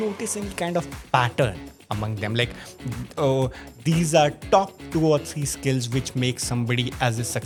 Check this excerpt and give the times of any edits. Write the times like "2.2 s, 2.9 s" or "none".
none